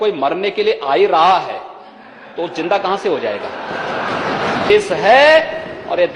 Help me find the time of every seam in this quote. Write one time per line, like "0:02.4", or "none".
0:04.7